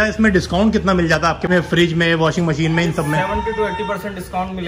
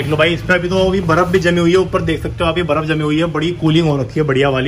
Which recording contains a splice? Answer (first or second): first